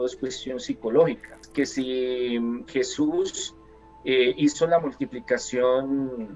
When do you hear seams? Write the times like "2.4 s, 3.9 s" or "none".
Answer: 1.4 s